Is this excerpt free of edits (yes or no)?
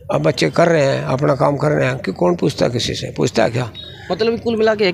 yes